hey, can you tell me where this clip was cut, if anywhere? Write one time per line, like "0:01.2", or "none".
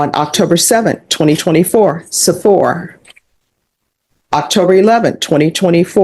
none